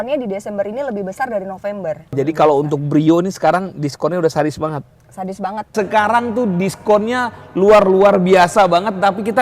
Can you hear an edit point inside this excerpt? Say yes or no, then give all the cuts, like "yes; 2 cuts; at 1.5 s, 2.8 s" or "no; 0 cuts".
yes; 2 cuts; at 2.1 s, 5.7 s